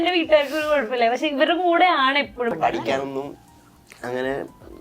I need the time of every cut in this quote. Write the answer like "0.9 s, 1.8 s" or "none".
2.5 s